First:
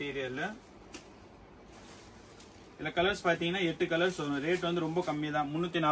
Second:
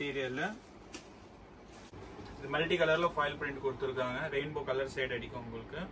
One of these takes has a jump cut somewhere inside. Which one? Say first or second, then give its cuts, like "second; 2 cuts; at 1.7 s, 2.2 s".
second; 1 cut; at 1.9 s